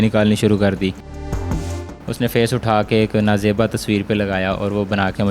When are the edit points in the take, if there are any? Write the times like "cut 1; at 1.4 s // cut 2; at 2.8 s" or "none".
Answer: cut 1; at 1.4 s